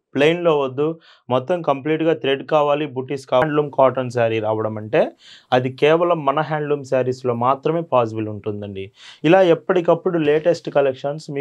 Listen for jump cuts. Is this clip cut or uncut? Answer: cut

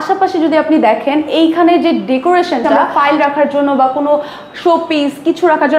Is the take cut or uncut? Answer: cut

